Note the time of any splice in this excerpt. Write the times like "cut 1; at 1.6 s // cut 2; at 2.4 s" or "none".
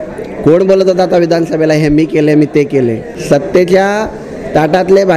cut 1; at 3.1 s